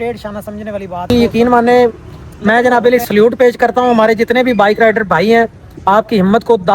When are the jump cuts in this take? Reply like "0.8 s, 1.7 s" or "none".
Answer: 1.0 s